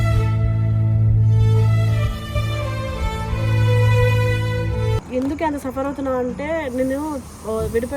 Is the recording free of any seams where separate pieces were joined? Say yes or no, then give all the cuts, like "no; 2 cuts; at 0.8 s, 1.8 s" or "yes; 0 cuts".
no; 1 cut; at 5.0 s